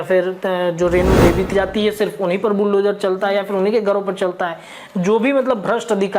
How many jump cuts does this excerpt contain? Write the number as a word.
one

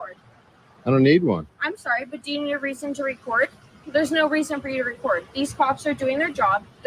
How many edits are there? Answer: zero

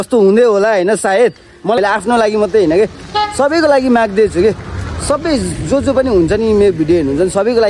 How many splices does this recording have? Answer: one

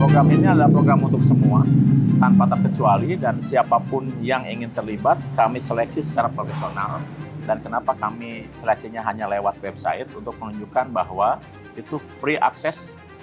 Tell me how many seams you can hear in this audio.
zero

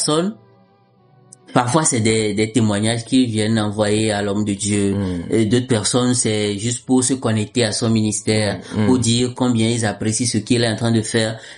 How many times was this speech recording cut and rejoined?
zero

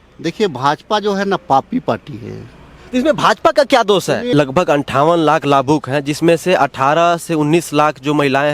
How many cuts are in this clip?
one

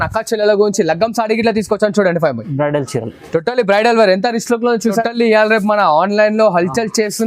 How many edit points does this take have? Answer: one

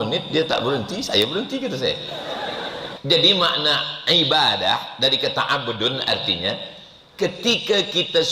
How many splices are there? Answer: one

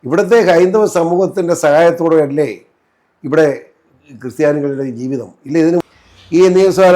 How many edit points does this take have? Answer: one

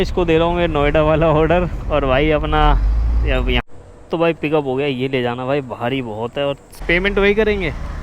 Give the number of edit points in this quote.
two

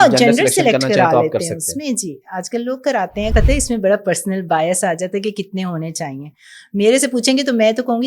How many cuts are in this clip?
one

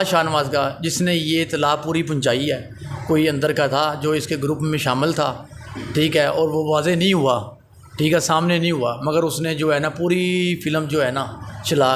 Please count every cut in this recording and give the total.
zero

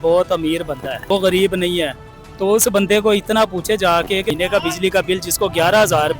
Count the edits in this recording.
two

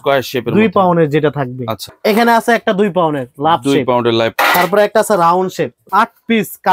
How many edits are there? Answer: three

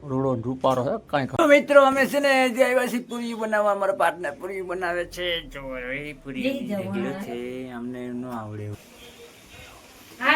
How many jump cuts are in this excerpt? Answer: two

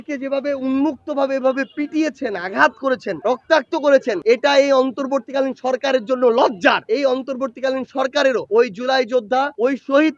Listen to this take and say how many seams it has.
two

